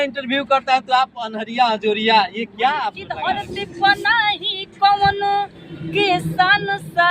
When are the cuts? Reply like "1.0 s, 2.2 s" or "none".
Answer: 3.1 s